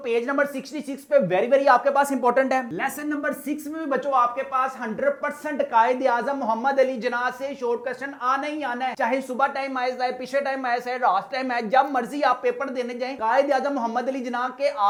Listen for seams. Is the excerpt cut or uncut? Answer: uncut